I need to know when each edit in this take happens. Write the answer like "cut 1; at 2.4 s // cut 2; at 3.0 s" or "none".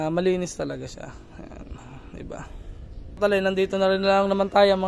cut 1; at 3.2 s